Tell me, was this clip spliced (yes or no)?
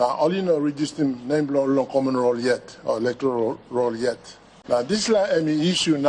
yes